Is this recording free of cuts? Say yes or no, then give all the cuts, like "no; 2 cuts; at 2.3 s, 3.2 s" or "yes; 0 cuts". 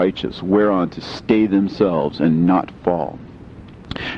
yes; 0 cuts